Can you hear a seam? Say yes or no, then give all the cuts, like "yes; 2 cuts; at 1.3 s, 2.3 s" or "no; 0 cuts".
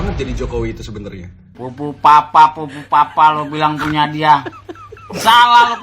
yes; 1 cut; at 1.6 s